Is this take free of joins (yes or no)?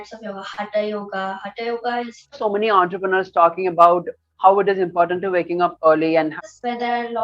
no